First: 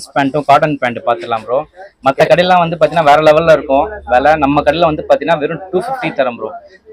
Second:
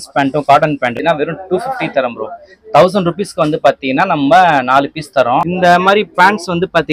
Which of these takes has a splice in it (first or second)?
second